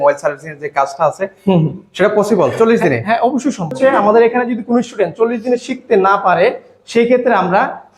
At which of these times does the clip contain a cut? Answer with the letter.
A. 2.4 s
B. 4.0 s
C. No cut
B